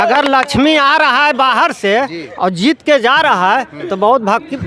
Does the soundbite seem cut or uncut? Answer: uncut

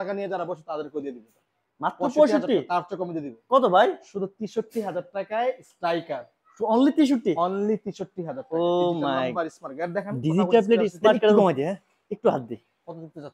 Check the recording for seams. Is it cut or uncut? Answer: cut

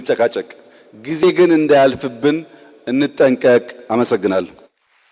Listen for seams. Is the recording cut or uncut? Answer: uncut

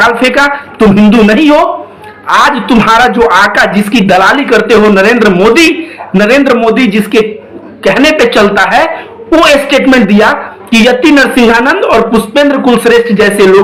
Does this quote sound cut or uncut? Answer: uncut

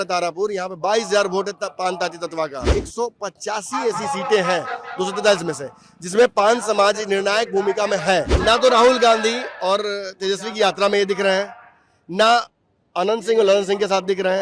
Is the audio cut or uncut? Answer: cut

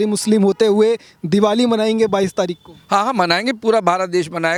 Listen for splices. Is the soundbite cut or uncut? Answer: uncut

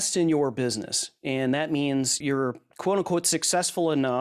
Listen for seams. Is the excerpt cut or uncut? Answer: cut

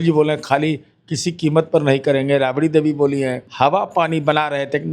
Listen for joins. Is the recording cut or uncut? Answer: cut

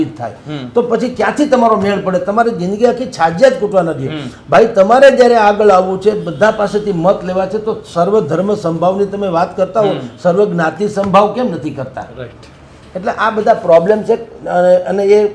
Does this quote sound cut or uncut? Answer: uncut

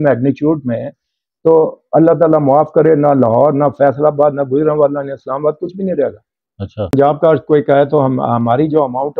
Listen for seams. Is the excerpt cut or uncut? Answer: cut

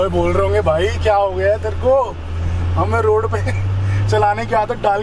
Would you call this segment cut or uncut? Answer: uncut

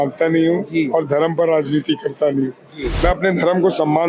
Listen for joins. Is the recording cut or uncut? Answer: uncut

